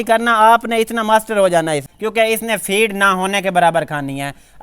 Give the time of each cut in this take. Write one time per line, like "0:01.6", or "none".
0:02.0